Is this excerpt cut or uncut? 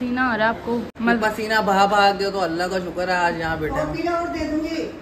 cut